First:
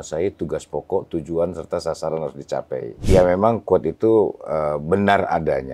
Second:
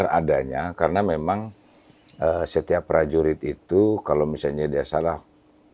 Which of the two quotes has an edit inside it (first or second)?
first